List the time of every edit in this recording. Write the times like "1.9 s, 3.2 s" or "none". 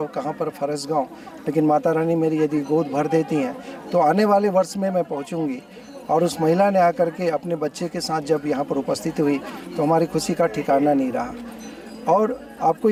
none